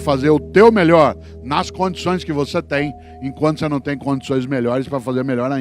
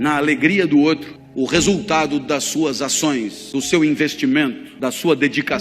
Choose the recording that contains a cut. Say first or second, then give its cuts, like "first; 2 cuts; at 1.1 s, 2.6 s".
second; 3 cuts; at 1.2 s, 3.4 s, 4.7 s